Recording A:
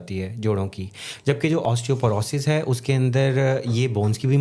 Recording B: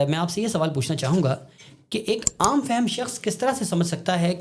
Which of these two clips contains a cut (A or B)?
A